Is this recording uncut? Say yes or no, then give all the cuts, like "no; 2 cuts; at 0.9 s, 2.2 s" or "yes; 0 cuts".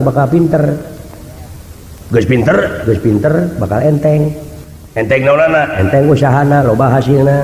yes; 0 cuts